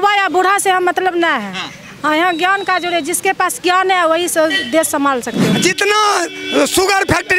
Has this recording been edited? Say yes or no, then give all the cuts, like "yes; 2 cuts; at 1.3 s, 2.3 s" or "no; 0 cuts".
yes; 1 cut; at 5.5 s